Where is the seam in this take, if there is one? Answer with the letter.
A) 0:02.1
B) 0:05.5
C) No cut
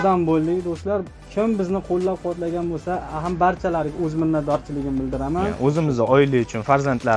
B